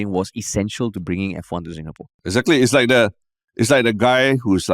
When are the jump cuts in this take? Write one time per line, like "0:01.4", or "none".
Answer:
0:02.2